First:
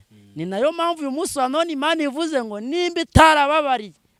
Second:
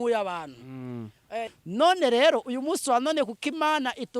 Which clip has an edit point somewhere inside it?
second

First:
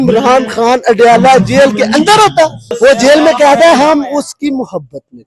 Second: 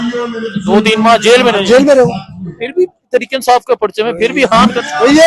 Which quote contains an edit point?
first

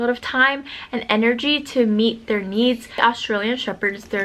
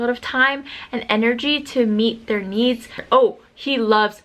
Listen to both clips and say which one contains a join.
second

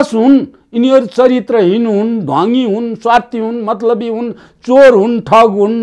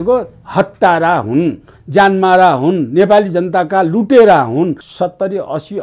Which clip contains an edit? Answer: second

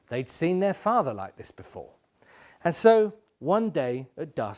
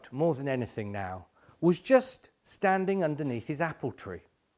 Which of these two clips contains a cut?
second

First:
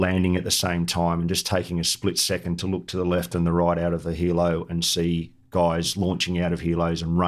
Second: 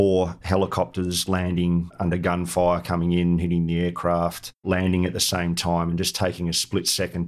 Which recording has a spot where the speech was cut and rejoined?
second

